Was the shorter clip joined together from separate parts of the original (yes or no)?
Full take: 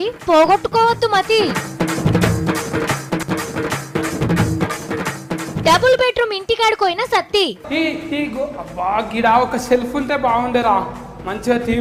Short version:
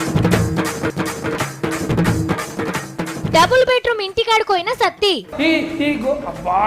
yes